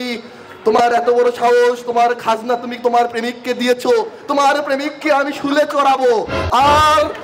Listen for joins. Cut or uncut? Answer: uncut